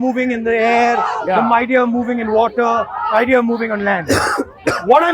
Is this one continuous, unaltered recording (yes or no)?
yes